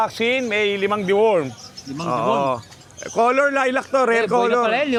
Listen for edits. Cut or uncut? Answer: uncut